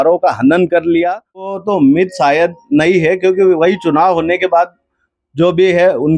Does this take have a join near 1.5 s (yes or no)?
yes